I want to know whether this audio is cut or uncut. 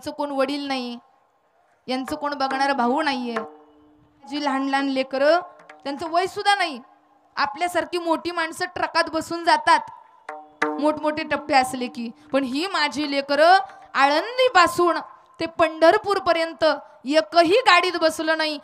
cut